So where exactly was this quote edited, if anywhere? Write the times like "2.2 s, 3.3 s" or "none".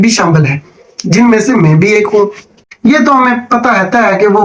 2.7 s

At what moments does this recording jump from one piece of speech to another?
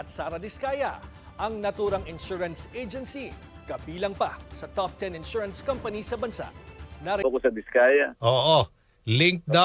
7.2 s

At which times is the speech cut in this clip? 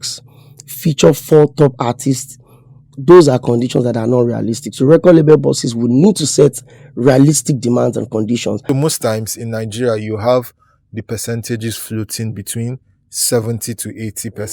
8.6 s

